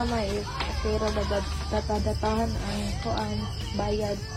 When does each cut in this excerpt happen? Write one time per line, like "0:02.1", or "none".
none